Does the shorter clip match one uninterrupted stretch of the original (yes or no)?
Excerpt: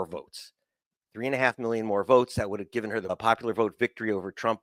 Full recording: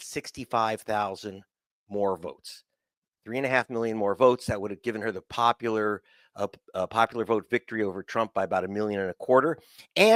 no